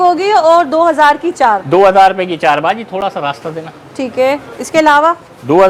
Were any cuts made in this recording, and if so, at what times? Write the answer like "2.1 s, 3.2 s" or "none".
none